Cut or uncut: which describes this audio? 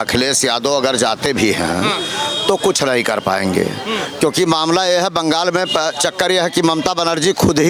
uncut